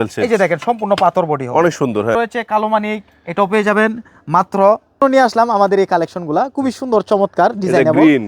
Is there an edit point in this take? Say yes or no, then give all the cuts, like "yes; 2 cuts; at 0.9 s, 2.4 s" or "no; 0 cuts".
yes; 2 cuts; at 2.1 s, 5.0 s